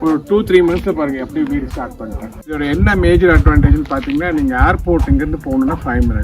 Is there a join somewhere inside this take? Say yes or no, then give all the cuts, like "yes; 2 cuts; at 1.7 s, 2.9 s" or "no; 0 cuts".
yes; 1 cut; at 2.6 s